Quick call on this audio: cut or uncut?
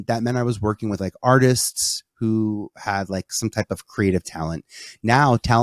uncut